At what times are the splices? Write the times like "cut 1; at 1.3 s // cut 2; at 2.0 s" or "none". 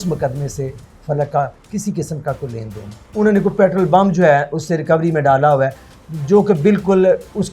cut 1; at 3.0 s